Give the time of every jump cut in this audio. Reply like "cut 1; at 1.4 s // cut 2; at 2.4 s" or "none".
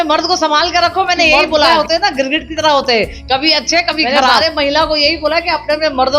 cut 1; at 1.7 s // cut 2; at 4.4 s